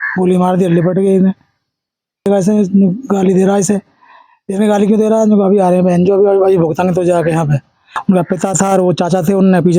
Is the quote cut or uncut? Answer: cut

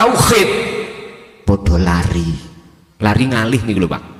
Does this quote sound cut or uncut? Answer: uncut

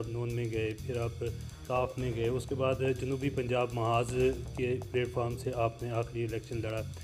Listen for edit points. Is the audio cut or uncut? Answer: cut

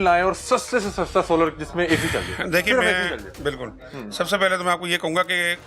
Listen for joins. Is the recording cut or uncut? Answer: uncut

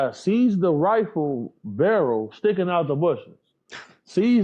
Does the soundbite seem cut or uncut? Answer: uncut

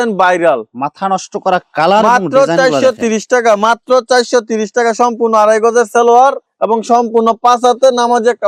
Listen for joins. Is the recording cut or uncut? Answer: uncut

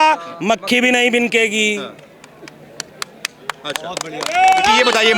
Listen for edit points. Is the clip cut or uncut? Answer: uncut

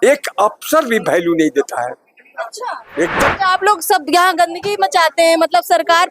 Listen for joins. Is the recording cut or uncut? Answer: cut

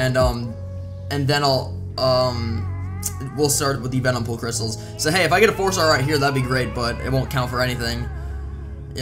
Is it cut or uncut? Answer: cut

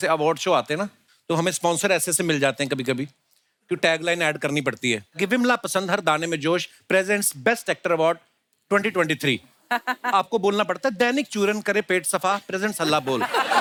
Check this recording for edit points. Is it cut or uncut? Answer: uncut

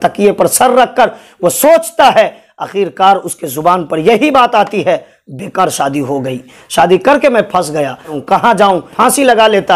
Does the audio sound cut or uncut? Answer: cut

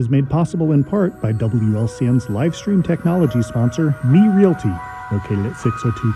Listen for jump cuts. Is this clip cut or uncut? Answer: uncut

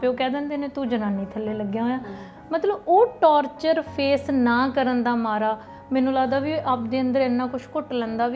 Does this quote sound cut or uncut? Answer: uncut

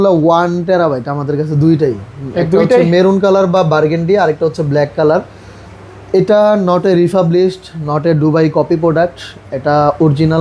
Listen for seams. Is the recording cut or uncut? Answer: uncut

